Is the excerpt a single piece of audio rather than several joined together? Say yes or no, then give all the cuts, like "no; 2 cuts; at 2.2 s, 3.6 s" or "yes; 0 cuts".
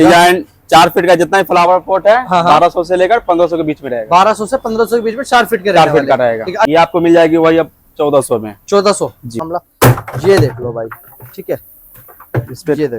no; 2 cuts; at 6.7 s, 9.4 s